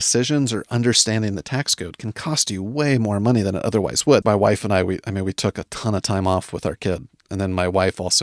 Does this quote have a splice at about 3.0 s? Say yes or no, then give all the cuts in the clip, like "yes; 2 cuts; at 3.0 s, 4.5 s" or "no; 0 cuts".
no; 1 cut; at 4.2 s